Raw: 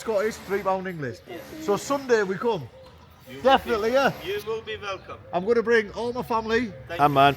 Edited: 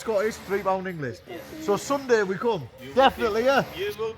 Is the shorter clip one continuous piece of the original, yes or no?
no